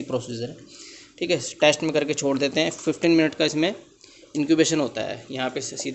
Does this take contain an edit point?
no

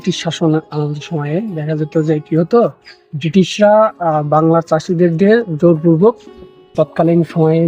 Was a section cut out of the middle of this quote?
yes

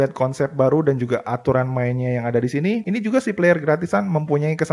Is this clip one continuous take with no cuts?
no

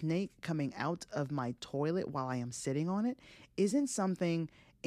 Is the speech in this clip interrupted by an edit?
no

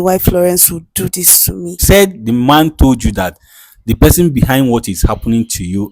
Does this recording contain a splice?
yes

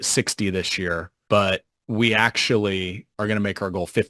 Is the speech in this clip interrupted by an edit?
yes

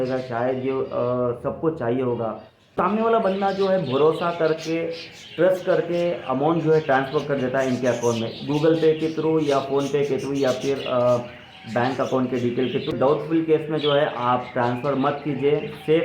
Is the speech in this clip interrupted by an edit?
yes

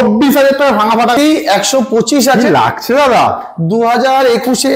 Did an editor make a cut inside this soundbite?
yes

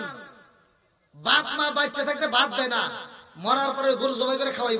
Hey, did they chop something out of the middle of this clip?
no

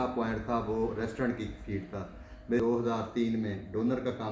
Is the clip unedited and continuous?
no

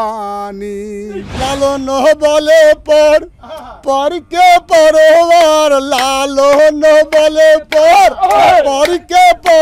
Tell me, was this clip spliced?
yes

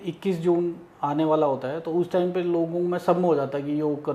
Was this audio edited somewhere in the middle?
no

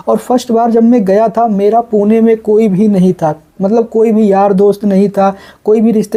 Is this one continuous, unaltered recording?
yes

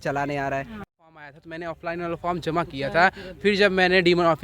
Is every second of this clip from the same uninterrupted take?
no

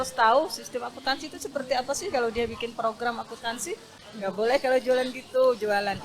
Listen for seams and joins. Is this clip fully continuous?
no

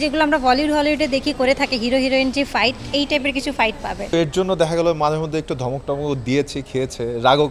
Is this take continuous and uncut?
no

